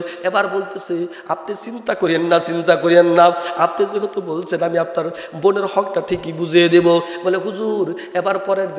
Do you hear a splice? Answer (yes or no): no